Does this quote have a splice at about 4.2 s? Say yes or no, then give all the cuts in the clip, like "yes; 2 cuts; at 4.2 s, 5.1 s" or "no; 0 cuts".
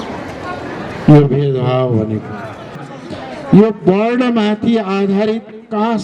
no; 1 cut; at 2.9 s